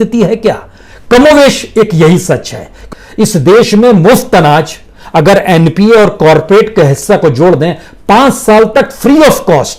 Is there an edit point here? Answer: yes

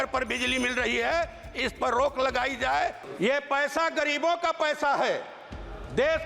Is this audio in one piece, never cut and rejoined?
no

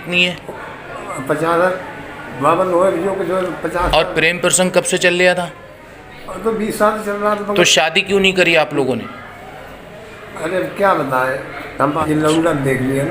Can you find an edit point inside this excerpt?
yes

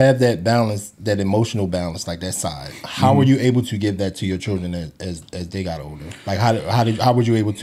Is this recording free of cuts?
yes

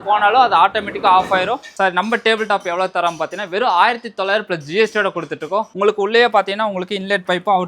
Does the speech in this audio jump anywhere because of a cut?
yes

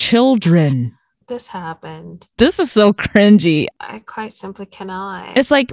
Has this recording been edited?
yes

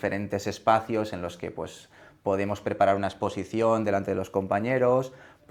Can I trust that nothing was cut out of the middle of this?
yes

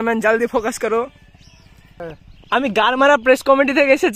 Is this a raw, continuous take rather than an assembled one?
no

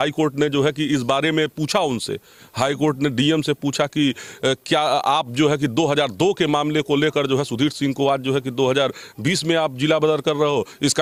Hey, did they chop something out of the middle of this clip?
no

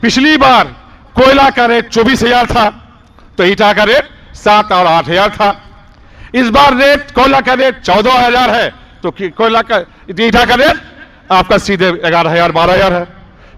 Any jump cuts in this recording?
no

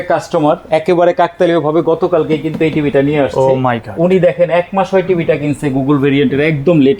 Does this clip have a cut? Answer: no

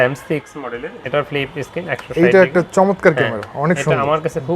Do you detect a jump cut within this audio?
no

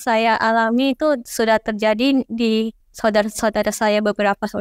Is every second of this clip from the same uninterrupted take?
no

